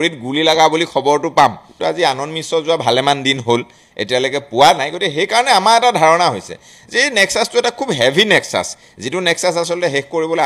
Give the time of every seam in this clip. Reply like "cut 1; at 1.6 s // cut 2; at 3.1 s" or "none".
none